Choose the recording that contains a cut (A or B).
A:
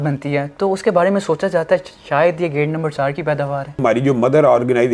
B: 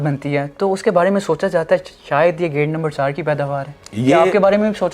A